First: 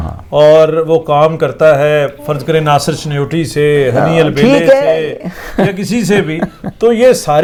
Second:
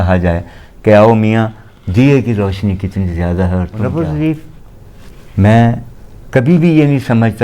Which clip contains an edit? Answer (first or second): second